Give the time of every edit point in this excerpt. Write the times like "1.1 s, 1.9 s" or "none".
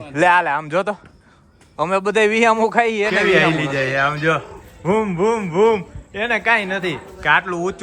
3.2 s